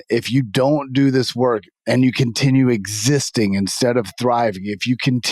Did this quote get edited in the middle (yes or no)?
no